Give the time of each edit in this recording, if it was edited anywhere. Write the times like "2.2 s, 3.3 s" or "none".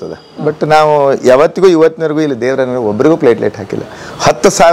none